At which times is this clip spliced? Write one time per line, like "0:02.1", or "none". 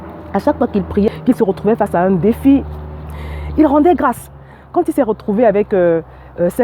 0:01.1